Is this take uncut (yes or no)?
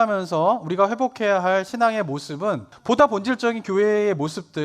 no